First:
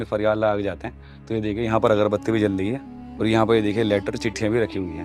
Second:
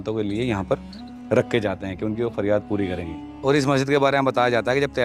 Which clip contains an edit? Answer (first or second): second